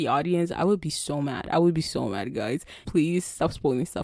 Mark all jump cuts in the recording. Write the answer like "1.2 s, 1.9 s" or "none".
none